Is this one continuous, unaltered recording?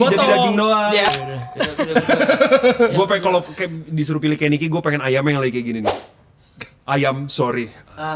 no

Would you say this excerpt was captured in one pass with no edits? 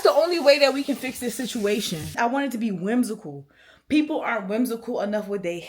no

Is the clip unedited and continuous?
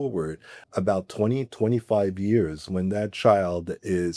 yes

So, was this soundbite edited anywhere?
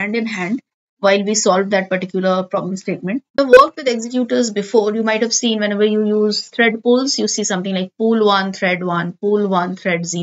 yes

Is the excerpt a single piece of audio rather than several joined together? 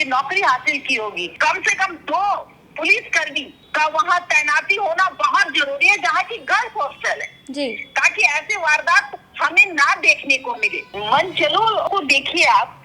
no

